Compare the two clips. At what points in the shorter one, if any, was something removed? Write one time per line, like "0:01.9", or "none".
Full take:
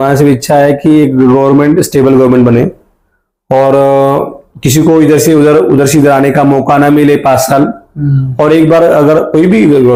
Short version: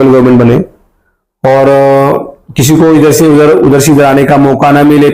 none